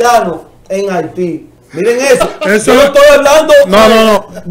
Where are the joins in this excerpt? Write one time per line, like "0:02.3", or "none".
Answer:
0:01.6